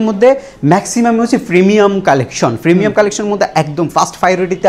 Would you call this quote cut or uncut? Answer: uncut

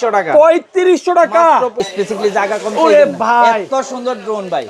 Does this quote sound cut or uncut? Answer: cut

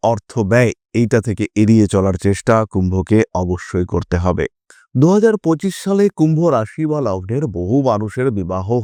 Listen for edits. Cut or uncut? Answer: uncut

